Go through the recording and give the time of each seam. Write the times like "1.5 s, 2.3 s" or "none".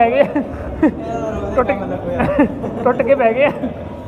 none